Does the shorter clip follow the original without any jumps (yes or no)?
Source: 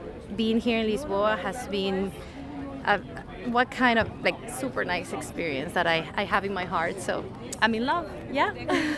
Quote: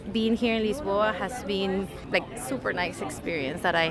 no